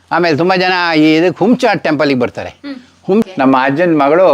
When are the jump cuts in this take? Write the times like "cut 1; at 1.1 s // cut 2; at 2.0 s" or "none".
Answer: cut 1; at 3.3 s